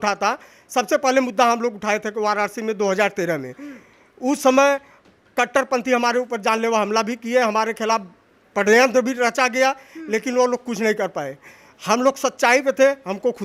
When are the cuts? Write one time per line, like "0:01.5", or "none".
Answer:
none